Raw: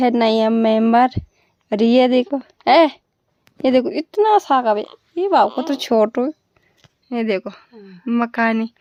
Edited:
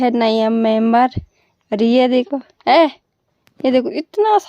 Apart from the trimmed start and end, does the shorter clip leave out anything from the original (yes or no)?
no